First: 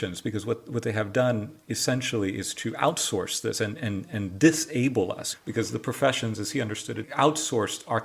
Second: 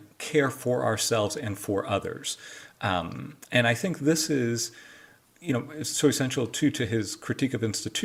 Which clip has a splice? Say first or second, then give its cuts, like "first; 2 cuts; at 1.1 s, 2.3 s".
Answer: first; 2 cuts; at 5.3 s, 7.0 s